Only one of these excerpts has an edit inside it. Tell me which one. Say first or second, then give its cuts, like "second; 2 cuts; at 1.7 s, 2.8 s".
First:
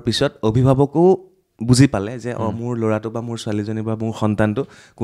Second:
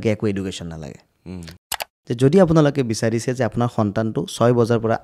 second; 1 cut; at 1.7 s